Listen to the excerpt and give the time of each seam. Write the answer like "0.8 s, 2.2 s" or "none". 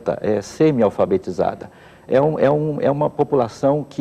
none